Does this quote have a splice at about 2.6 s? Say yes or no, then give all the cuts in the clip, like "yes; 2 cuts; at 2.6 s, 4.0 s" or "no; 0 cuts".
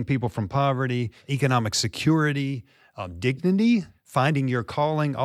no; 2 cuts; at 1.3 s, 4.0 s